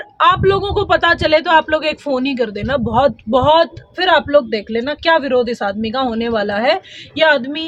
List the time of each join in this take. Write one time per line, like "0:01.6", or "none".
none